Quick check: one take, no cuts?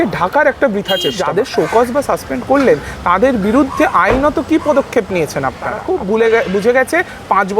no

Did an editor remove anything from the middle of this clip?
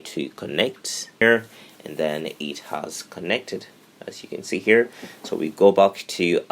yes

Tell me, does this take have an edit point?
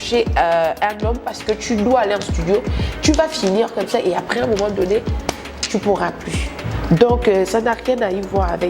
no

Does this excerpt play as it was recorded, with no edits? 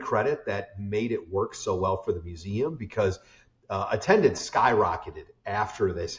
yes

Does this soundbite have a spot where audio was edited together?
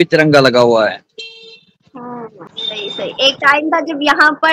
no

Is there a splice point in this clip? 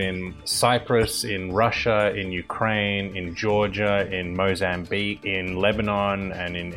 yes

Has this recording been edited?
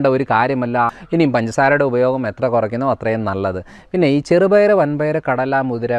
yes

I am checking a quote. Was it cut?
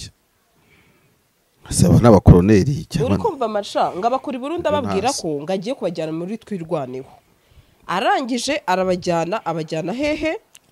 no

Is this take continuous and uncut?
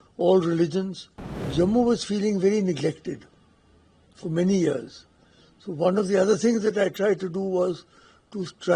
no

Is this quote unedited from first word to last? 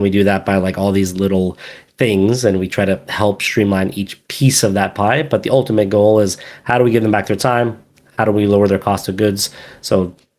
yes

